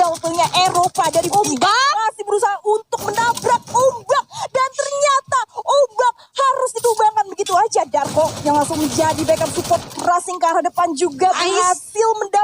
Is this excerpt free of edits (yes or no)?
yes